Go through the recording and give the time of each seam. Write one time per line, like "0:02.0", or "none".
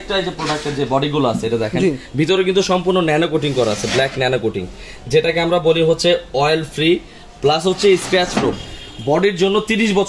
0:08.6